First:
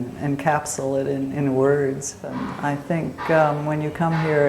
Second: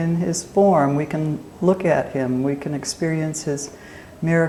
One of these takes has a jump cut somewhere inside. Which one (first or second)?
first